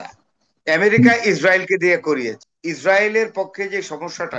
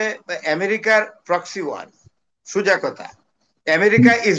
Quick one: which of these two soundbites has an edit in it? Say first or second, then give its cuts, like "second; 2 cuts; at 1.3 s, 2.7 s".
first; 1 cut; at 2.4 s